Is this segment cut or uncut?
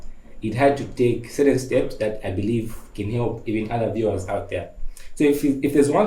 uncut